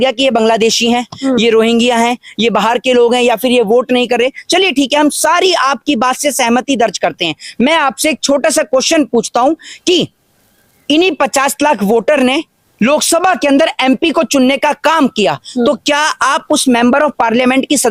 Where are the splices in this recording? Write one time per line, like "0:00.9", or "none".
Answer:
none